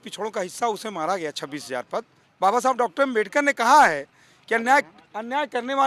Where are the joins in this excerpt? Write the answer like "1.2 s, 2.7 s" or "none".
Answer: 2.2 s